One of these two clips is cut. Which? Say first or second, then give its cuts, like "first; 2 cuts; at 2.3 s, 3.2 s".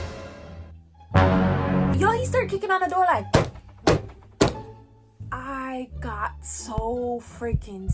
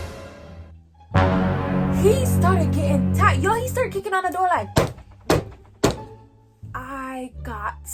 first; 1 cut; at 1.9 s